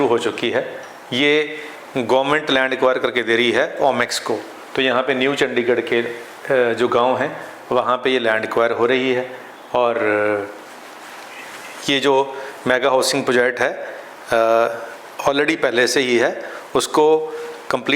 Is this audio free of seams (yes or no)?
yes